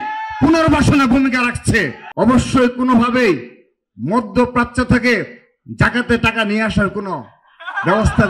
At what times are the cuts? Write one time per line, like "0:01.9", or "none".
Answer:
0:02.0

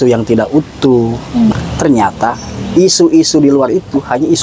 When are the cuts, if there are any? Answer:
0:01.5

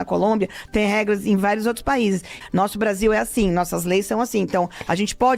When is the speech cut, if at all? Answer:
0:02.3

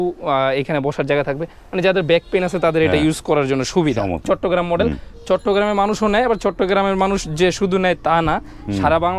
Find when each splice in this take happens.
0:04.2

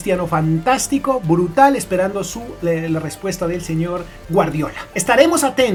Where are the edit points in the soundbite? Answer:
none

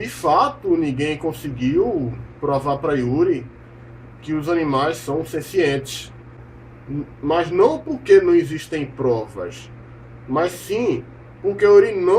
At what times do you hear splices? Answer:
0:08.5

